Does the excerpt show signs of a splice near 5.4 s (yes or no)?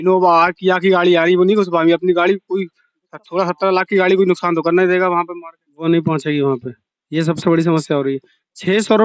no